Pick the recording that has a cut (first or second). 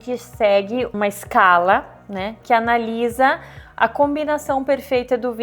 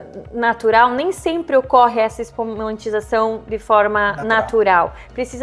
first